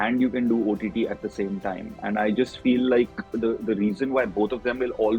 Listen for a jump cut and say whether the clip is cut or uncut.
uncut